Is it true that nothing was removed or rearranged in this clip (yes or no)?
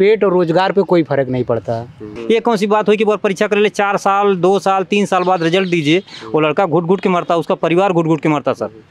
no